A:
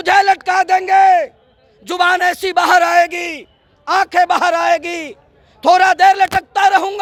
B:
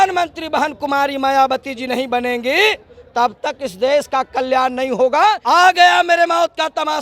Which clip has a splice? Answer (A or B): B